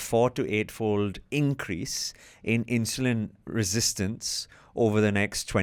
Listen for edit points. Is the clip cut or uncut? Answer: uncut